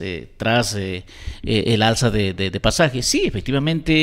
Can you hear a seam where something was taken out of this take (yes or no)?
no